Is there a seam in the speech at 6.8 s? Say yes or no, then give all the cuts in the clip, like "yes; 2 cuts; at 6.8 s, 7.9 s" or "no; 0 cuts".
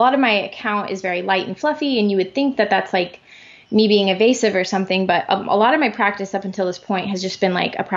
no; 0 cuts